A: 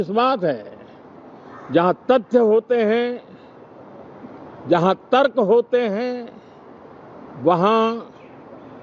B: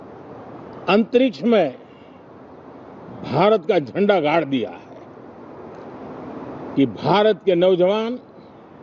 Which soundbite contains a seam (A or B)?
B